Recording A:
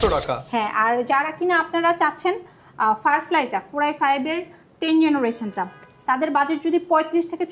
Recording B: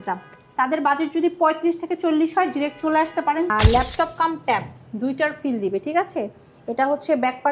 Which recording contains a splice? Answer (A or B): B